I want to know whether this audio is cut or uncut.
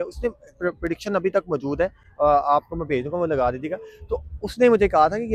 uncut